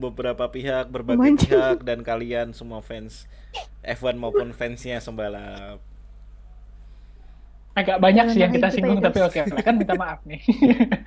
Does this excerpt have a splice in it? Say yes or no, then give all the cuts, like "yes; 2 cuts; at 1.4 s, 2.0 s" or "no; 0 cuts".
no; 0 cuts